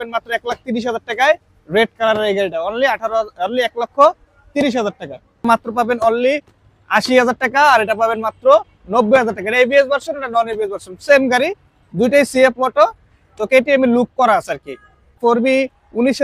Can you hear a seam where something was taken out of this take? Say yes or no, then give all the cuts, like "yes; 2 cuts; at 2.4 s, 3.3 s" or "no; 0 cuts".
yes; 2 cuts; at 5.4 s, 15.2 s